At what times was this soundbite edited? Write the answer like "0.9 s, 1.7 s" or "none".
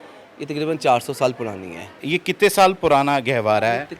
2.0 s